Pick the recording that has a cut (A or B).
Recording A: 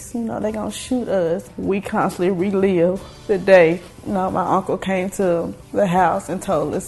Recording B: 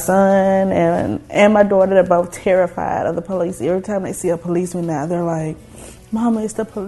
A